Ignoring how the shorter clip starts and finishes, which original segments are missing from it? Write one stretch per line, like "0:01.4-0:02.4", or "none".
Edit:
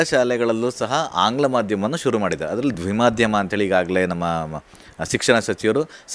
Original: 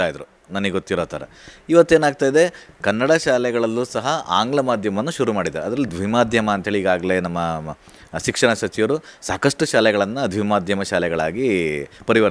none